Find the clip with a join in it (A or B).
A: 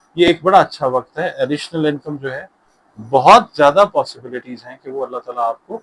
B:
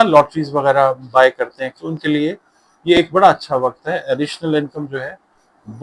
B